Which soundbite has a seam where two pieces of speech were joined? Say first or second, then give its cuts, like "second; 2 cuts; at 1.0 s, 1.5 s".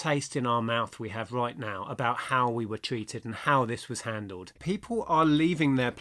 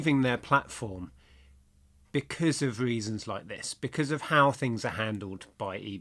first; 1 cut; at 4.6 s